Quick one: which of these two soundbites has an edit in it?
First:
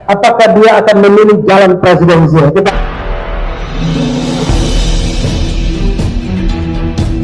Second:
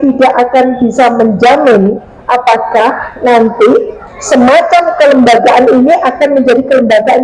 first; 1 cut; at 2.7 s

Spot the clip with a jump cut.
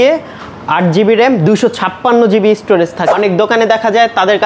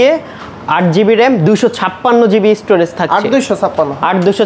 first; 1 cut; at 3.0 s

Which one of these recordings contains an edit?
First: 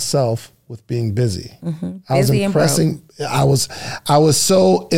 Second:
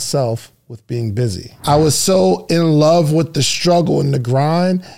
second; 1 cut; at 1.5 s

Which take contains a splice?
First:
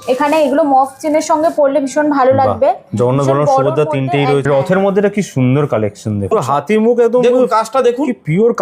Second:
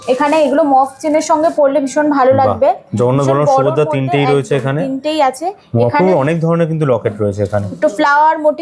first; 2 cuts; at 4.5 s, 6.3 s

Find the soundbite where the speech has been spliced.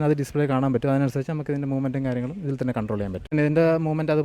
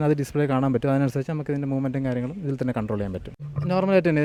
first; 1 cut; at 3.3 s

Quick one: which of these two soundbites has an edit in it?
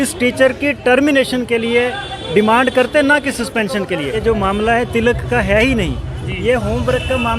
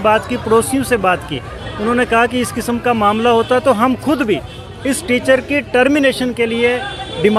first; 1 cut; at 4.2 s

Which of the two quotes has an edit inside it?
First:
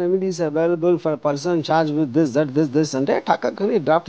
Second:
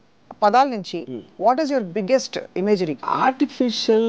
second; 1 cut; at 3.1 s

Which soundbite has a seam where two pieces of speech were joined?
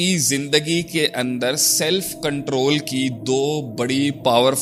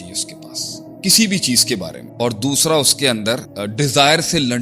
second; 2 cuts; at 2.0 s, 3.6 s

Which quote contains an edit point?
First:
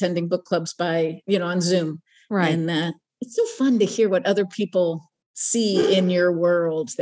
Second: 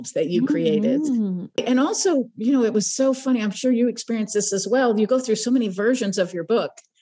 second; 1 cut; at 1.6 s

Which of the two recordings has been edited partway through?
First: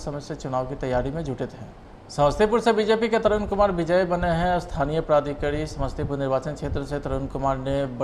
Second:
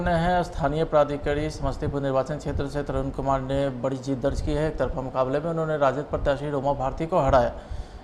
first; 1 cut; at 2.1 s

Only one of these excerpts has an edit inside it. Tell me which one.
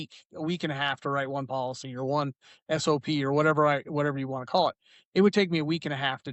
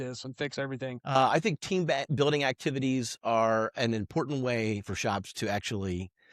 second; 1 cut; at 1.1 s

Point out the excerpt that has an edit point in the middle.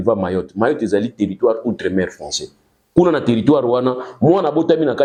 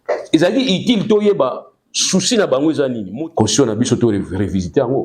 second; 1 cut; at 3.0 s

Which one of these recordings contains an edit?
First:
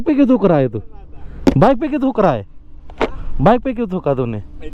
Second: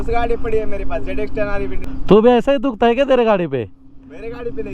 second; 1 cut; at 1.9 s

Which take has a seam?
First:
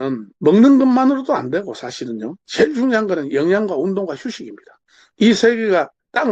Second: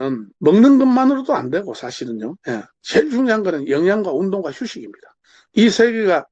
first; 1 cut; at 2.4 s

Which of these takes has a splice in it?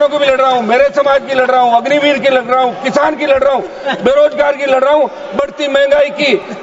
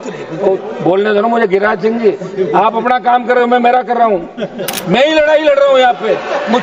second; 1 cut; at 4.7 s

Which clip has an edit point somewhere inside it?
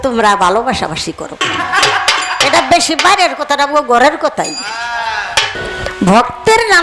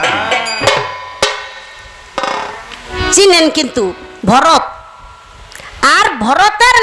first; 1 cut; at 5.5 s

